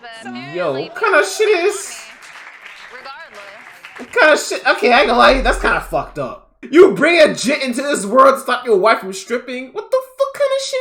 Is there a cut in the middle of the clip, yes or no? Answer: yes